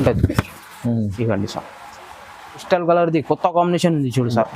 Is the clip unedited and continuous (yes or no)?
no